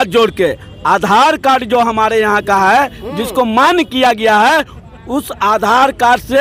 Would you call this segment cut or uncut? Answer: uncut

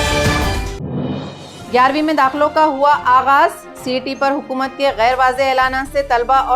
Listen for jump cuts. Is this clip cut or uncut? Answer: cut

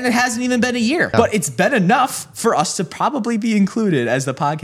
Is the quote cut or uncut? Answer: cut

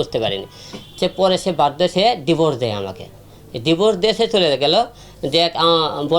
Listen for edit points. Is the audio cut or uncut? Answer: uncut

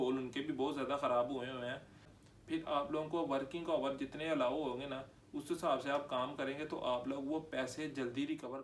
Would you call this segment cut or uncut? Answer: cut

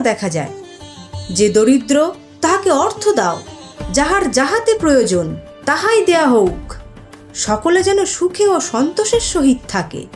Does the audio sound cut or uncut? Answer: uncut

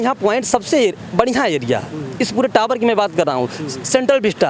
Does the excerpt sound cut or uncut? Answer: uncut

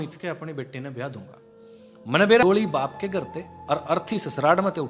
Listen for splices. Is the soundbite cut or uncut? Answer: cut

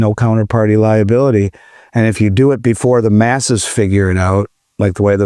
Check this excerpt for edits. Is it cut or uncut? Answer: uncut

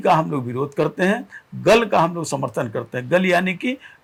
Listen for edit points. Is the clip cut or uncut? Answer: uncut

